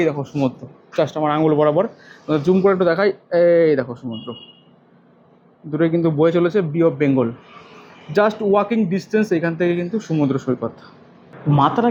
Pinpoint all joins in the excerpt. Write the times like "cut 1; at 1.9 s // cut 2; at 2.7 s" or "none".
none